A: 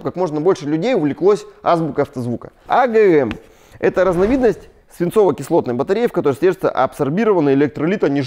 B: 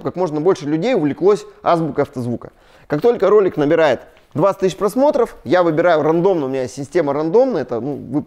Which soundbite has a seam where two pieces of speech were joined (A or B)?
A